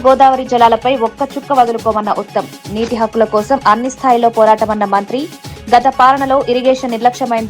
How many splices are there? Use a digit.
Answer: 0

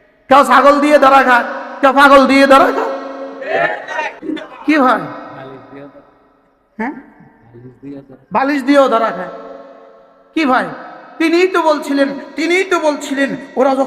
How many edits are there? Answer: 1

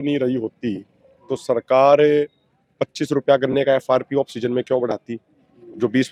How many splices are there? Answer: 0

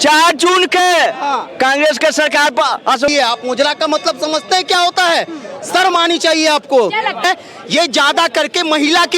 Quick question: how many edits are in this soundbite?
2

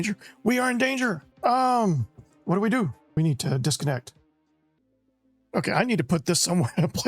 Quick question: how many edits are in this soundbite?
1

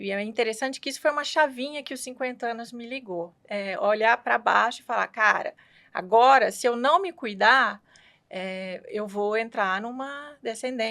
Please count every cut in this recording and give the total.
1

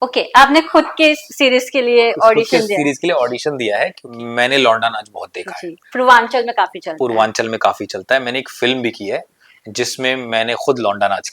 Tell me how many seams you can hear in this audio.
1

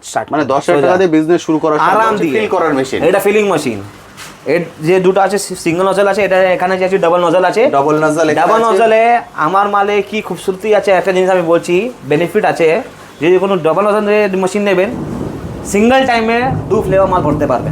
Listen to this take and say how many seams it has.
1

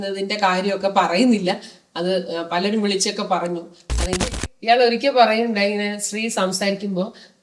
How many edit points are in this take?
1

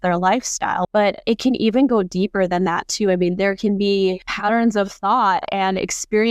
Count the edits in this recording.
2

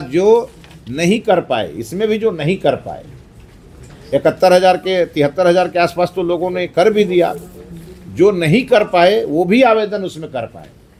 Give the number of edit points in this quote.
0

